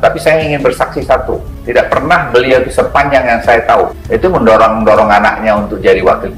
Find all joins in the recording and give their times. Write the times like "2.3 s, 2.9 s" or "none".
1.5 s, 4.0 s